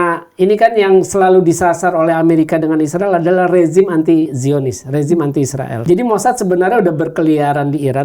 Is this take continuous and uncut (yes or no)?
no